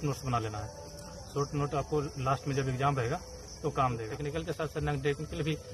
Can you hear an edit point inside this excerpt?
yes; 1 cut; at 4.1 s

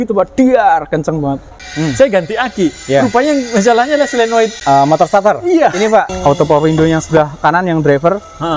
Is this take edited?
yes; 3 cuts; at 1.7 s, 4.6 s, 6.1 s

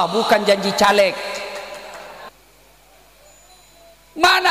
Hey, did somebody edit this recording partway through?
yes; 1 cut; at 2.3 s

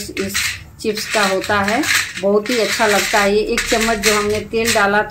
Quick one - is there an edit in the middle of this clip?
no; 0 cuts

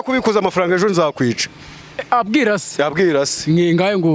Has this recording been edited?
no; 0 cuts

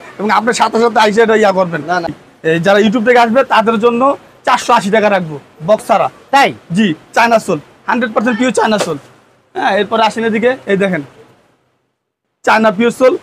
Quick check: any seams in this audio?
no; 0 cuts

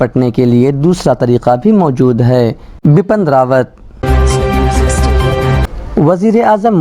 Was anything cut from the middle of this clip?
yes; 1 cut; at 4.0 s

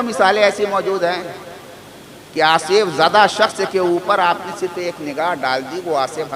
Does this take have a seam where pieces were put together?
no; 0 cuts

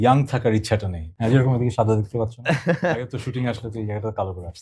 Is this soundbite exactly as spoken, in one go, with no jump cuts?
no; 1 cut; at 1.1 s

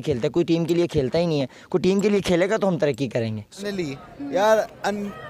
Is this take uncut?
no; 1 cut; at 3.8 s

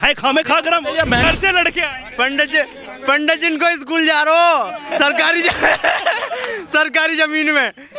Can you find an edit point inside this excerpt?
yes; 1 cut; at 1.2 s

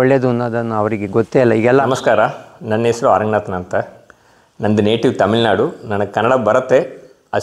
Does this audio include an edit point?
yes; 1 cut; at 1.8 s

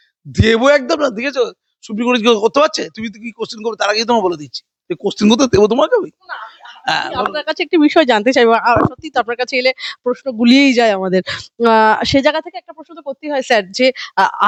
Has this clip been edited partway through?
no; 0 cuts

